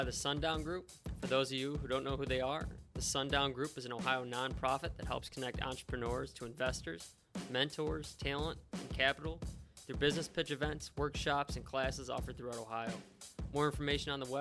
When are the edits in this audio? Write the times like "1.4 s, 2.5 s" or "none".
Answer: none